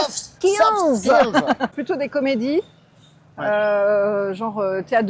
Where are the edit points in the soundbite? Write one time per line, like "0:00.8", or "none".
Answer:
0:01.7